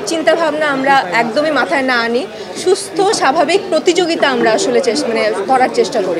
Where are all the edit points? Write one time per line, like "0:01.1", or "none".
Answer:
none